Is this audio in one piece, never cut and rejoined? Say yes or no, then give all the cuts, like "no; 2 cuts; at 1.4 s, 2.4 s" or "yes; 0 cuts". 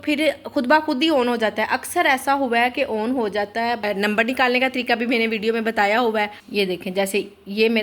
no; 2 cuts; at 3.8 s, 6.4 s